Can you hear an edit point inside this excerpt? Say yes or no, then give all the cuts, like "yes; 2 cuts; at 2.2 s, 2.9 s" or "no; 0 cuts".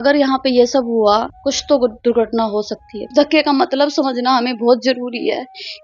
yes; 2 cuts; at 1.3 s, 3.0 s